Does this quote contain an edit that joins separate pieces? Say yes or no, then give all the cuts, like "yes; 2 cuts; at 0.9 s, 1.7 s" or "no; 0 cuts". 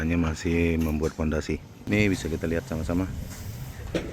yes; 1 cut; at 1.7 s